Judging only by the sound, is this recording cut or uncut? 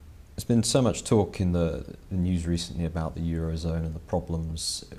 cut